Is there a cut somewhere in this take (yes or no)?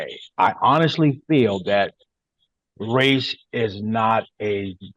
no